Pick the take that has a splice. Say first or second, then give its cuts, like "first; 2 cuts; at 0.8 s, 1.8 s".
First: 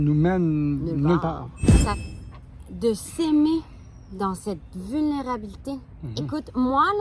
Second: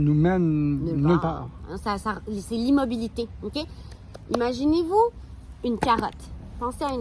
first; 1 cut; at 2.0 s